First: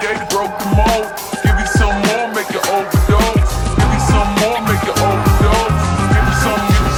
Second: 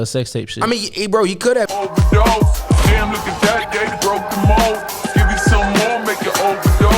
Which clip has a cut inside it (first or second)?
second